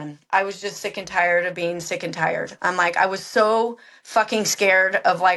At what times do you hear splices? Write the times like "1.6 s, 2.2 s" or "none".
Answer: none